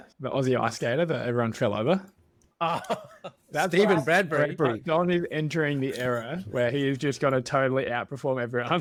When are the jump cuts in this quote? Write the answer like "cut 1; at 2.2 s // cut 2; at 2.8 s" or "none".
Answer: none